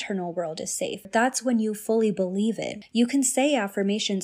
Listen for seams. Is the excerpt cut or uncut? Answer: cut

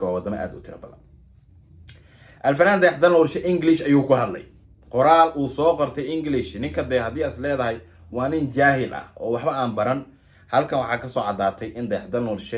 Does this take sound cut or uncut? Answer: uncut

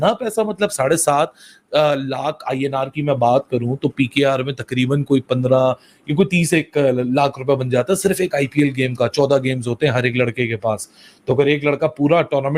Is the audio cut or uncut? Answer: uncut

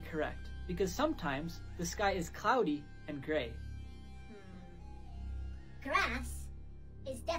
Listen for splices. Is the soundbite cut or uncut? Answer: uncut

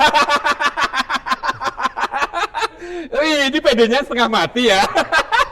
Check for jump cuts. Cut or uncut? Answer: uncut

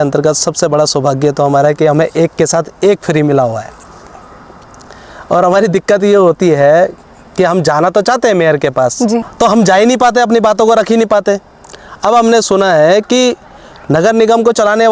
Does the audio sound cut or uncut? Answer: uncut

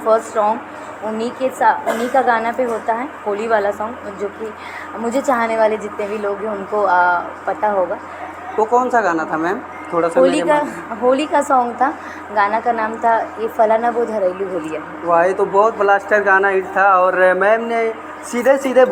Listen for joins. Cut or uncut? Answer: uncut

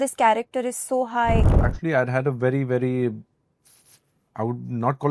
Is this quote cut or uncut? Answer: cut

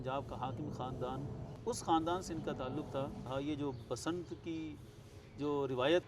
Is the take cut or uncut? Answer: cut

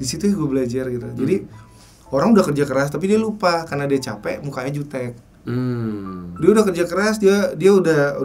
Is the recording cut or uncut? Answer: uncut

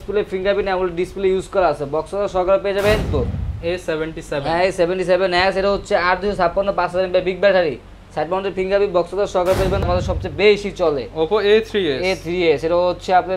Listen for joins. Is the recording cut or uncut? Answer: cut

